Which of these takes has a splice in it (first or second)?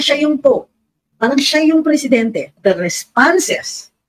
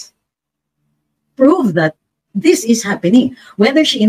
first